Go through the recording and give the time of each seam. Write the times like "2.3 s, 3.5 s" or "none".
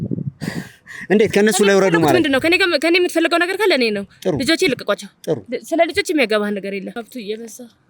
7.0 s